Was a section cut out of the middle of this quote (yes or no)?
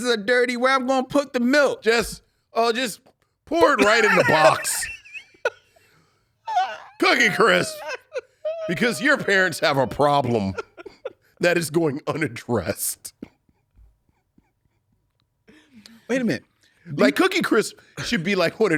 no